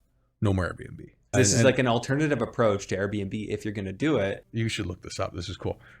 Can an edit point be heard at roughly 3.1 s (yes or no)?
no